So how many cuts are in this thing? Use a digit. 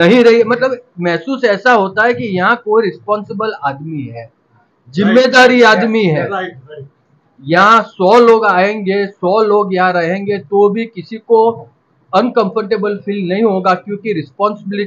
0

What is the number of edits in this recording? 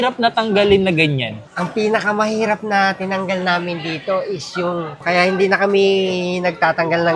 1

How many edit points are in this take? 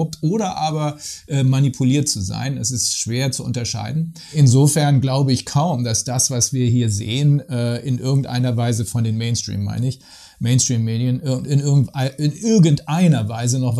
1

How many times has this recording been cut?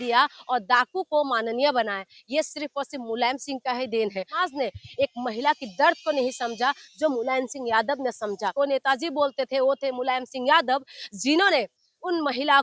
2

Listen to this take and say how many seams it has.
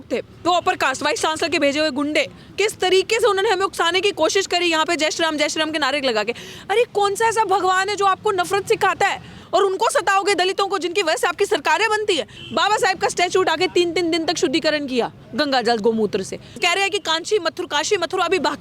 4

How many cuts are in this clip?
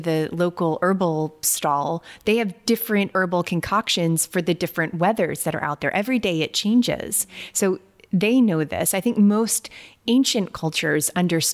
1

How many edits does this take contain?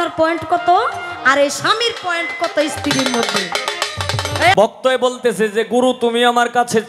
1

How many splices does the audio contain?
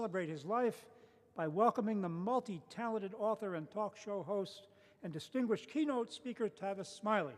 0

